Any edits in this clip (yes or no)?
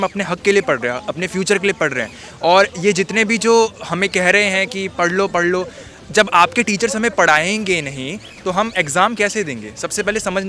no